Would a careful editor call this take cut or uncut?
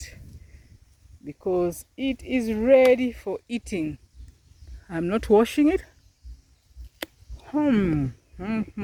uncut